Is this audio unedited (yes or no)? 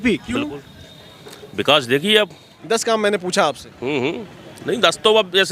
no